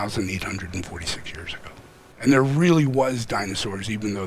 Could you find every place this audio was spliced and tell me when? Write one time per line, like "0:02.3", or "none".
0:02.1